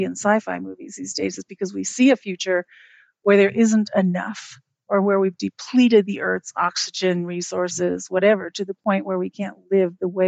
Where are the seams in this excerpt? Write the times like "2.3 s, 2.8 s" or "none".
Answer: none